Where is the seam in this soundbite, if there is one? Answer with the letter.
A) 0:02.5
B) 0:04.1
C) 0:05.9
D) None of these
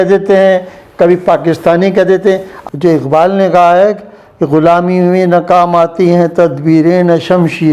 A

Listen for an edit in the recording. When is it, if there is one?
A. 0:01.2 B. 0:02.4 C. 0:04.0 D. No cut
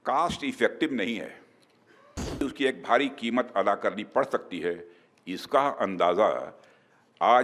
B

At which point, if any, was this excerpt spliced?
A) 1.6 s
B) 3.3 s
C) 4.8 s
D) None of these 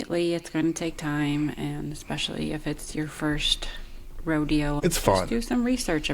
C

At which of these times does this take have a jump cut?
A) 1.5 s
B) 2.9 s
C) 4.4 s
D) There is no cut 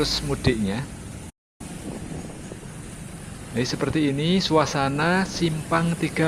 A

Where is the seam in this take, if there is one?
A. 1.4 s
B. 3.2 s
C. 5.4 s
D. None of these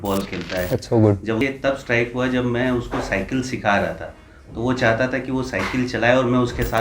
A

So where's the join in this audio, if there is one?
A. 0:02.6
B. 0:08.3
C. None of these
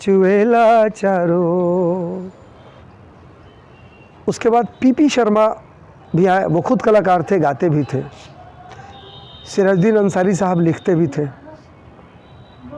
A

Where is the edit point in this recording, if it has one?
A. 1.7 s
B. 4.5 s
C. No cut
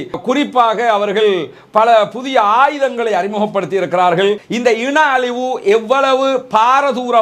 B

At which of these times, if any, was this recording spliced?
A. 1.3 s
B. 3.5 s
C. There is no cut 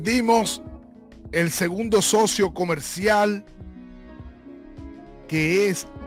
C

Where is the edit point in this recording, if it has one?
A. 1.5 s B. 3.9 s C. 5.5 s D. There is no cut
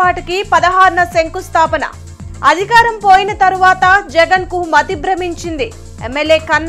D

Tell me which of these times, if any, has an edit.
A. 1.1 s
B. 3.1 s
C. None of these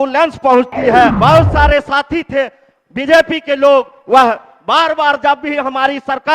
A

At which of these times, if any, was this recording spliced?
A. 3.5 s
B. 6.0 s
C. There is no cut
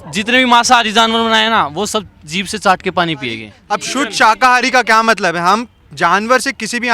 A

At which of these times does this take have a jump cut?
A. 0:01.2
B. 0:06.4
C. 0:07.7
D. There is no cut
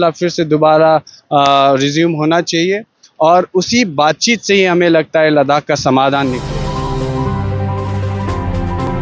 B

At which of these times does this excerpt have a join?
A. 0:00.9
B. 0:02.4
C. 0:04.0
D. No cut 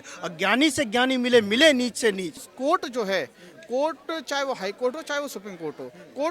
B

